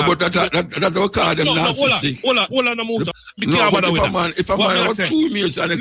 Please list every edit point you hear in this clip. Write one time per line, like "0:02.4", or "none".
0:03.2